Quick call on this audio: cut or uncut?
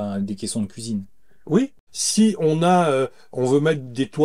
cut